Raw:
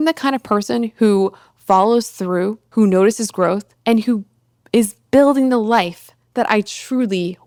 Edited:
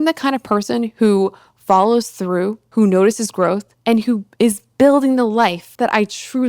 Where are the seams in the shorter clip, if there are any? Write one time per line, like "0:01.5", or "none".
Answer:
0:04.3
0:05.6